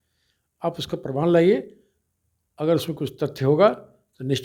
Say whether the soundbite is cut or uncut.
uncut